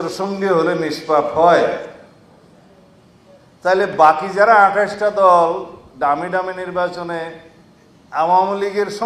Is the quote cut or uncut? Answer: uncut